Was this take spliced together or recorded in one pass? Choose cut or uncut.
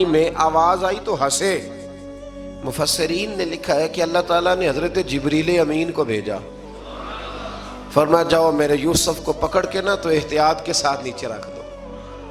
uncut